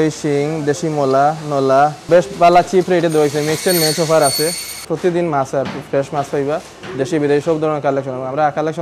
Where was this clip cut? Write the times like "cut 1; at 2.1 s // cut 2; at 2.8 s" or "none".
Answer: cut 1; at 2.0 s // cut 2; at 4.8 s